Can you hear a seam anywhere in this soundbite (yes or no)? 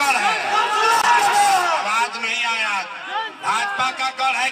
no